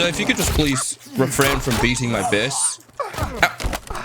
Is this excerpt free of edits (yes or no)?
no